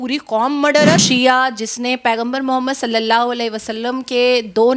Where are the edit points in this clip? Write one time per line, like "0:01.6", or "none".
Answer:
0:01.0